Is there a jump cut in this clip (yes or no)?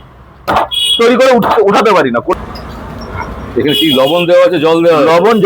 yes